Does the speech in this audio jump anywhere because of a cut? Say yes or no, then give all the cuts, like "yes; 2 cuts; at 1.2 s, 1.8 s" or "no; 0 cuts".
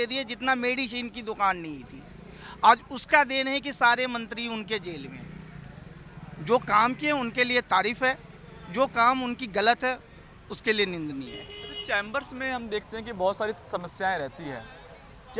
no; 0 cuts